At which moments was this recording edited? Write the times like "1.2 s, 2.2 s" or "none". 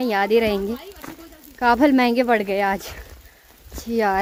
none